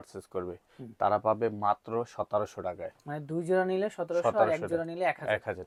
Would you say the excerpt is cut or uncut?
uncut